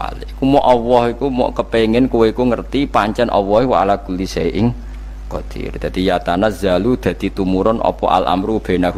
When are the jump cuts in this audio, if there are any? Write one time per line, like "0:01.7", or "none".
none